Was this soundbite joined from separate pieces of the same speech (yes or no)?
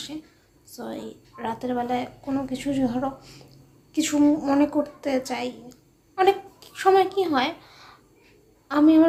no